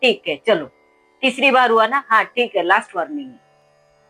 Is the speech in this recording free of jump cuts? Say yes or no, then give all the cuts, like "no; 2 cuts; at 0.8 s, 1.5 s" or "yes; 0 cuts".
yes; 0 cuts